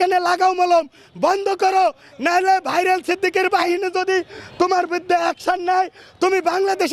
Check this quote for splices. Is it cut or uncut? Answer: uncut